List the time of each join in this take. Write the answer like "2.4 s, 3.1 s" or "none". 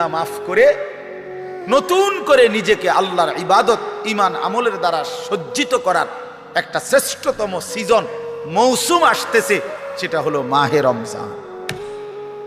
11.3 s